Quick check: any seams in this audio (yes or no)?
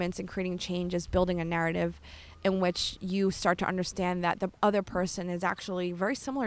no